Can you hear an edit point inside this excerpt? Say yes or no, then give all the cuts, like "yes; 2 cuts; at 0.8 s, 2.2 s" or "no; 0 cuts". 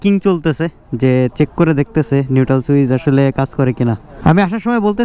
yes; 1 cut; at 4.1 s